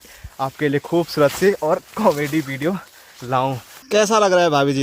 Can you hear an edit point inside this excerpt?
yes; 1 cut; at 3.7 s

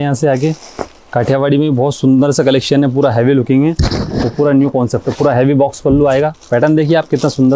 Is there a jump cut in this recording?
no; 0 cuts

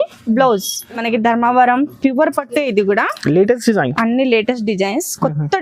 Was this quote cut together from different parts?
yes; 1 cut; at 1.0 s

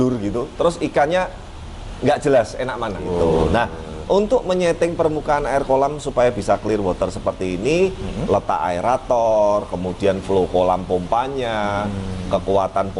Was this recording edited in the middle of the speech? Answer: yes; 1 cut; at 3.0 s

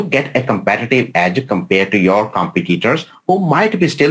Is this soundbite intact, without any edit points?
yes; 0 cuts

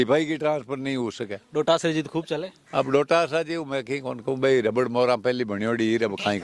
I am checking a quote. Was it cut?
no; 0 cuts

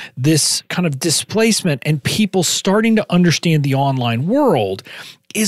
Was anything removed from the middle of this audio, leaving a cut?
no; 0 cuts

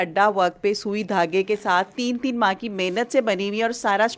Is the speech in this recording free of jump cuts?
yes; 0 cuts

